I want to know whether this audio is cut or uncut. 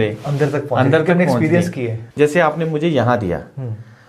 uncut